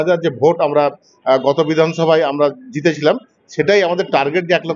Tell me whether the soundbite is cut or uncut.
uncut